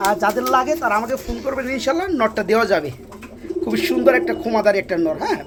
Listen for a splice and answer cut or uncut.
uncut